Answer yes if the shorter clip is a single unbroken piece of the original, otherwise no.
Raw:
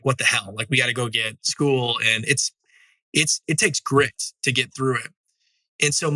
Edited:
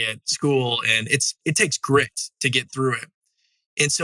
no